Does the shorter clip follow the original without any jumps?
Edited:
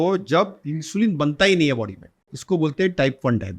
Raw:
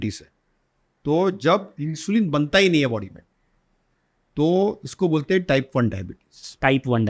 no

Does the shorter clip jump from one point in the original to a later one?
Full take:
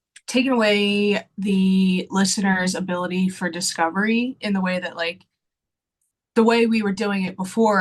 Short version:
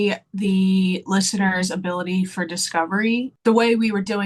yes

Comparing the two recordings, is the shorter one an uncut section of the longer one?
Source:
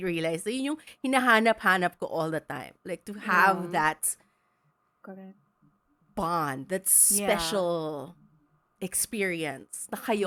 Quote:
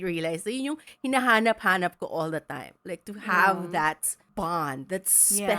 no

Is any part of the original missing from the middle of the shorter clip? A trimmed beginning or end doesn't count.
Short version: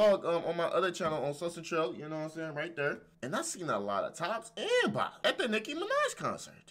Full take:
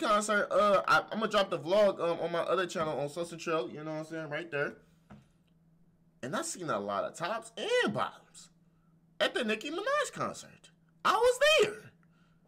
yes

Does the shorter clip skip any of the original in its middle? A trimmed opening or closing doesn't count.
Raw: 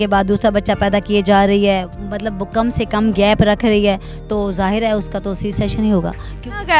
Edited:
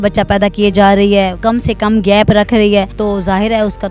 yes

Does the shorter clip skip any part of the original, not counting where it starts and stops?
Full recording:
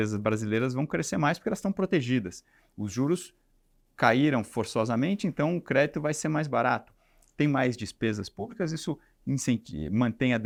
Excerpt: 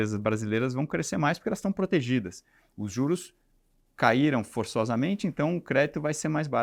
no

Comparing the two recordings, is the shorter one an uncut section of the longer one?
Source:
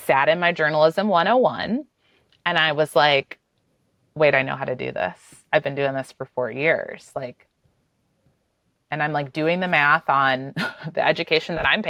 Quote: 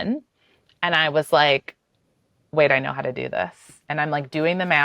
no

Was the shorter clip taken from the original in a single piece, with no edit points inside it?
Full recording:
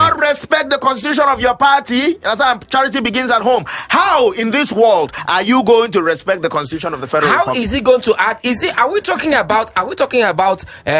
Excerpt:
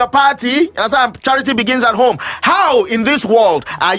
yes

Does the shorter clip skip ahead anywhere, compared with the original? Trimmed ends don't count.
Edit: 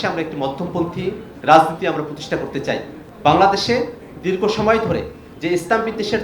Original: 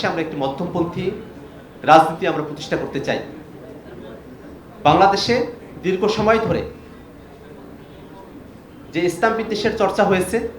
yes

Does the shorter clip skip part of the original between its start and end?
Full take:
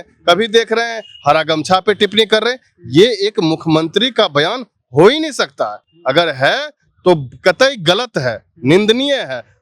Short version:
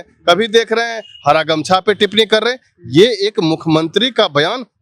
no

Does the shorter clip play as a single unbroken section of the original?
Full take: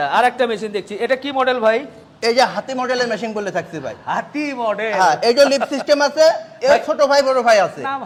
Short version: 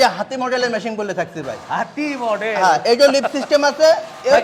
yes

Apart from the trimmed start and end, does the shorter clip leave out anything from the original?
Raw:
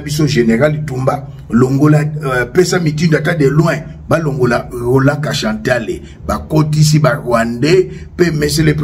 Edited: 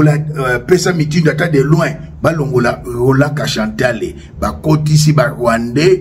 no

